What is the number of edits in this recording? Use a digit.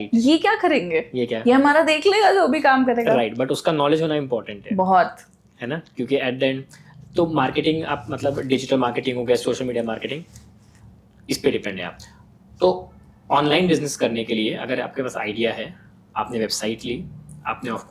0